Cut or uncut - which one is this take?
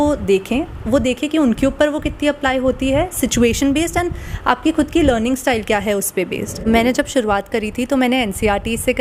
cut